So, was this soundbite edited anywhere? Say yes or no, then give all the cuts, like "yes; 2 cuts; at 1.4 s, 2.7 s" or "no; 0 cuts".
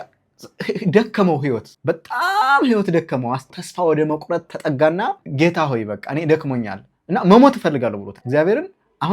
yes; 4 cuts; at 1.7 s, 3.5 s, 5.3 s, 8.1 s